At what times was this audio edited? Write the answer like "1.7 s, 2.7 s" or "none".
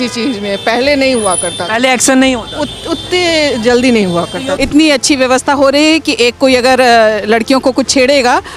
4.5 s